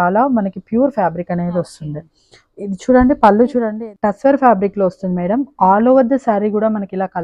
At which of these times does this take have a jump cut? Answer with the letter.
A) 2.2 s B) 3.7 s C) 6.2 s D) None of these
B